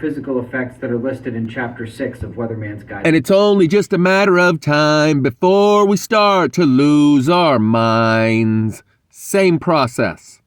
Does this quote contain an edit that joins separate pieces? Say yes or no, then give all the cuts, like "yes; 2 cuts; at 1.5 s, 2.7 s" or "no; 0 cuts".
no; 0 cuts